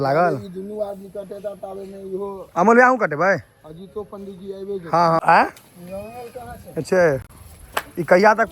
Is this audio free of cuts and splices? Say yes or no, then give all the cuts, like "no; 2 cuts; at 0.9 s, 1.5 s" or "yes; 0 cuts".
no; 1 cut; at 5.2 s